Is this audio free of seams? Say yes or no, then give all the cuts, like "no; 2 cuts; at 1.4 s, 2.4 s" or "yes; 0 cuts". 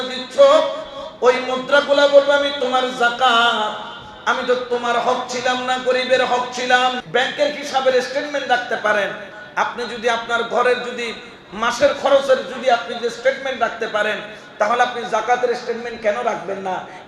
no; 1 cut; at 7.0 s